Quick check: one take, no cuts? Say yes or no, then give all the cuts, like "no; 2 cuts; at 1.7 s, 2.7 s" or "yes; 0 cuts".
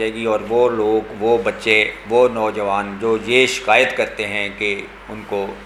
yes; 0 cuts